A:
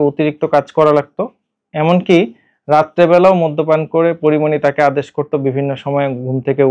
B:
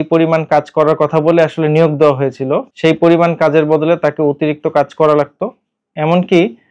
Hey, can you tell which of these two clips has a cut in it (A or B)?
B